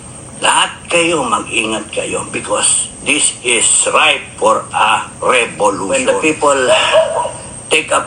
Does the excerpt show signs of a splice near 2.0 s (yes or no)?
no